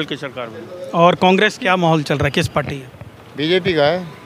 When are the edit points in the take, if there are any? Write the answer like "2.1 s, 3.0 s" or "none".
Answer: 1.6 s